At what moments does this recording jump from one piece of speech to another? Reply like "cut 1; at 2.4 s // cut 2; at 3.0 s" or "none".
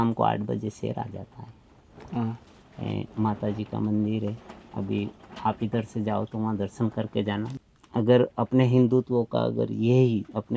cut 1; at 7.5 s